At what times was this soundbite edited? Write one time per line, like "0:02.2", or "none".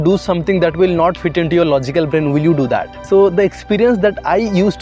0:02.9

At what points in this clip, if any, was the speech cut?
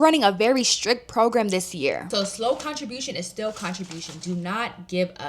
0:02.0

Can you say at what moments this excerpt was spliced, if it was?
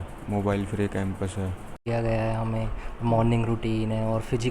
0:01.8

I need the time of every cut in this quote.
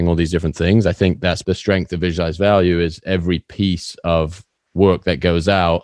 0:01.4

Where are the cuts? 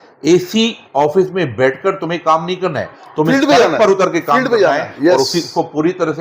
none

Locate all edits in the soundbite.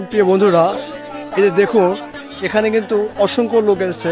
none

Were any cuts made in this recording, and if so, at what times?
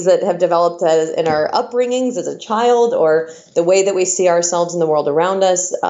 none

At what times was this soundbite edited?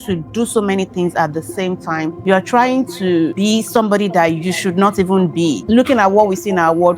0:02.2
0:03.3
0:05.6

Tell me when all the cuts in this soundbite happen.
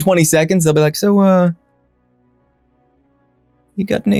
none

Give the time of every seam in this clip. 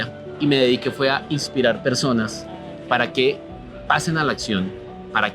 none

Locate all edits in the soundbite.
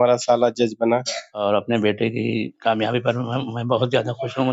0:01.3

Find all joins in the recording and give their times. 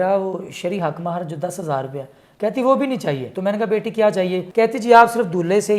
0:03.3
0:04.4

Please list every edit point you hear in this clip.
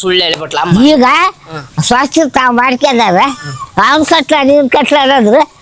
none

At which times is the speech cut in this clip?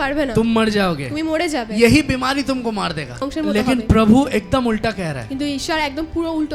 0:03.2

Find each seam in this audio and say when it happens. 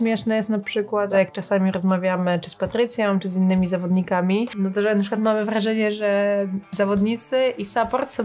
0:01.1
0:04.5

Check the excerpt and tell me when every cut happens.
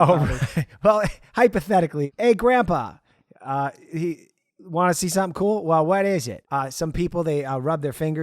0:02.0
0:06.4

